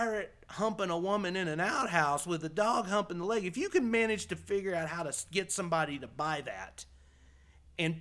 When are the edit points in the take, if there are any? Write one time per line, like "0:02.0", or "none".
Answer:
none